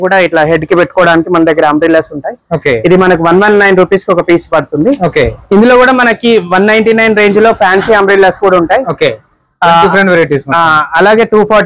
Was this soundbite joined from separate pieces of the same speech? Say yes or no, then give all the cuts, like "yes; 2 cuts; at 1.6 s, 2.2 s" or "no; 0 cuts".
no; 0 cuts